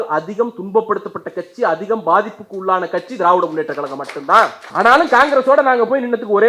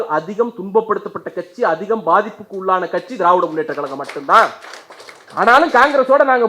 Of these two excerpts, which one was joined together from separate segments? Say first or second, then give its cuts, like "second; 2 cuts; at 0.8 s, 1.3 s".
first; 1 cut; at 4.6 s